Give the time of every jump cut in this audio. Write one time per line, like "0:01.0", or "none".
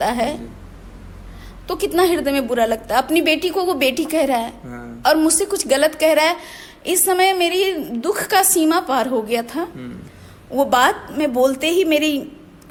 none